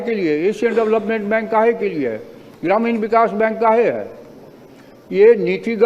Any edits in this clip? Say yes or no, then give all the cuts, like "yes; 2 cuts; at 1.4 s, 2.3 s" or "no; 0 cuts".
no; 0 cuts